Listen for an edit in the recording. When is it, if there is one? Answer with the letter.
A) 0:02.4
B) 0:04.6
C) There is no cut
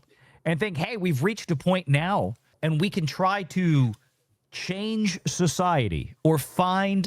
A